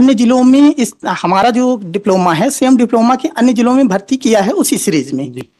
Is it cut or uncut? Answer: uncut